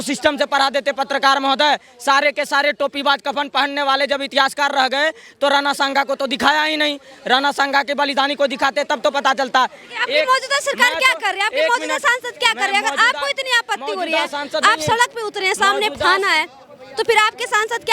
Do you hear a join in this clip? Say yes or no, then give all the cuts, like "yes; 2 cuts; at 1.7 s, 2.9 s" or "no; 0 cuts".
no; 0 cuts